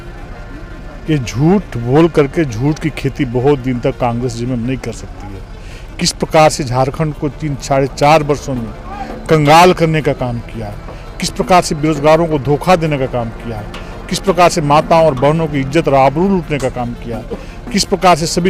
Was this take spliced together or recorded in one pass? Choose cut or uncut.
uncut